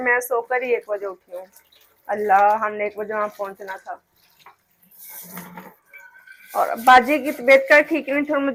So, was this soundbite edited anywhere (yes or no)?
no